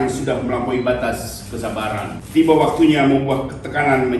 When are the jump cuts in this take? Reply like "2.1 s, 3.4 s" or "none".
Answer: 2.2 s